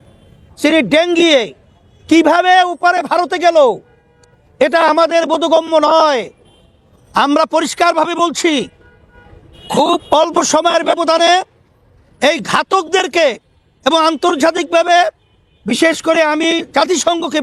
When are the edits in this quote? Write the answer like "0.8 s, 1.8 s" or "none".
none